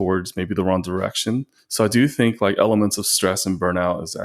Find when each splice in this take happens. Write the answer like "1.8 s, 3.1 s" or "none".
1.6 s